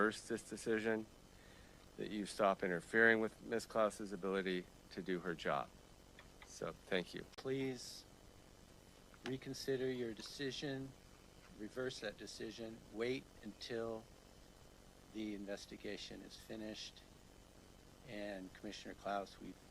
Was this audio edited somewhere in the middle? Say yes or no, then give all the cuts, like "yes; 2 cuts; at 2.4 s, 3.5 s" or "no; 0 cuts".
yes; 1 cut; at 7.3 s